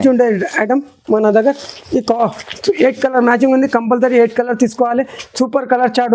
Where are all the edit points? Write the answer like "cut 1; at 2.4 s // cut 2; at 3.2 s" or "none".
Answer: none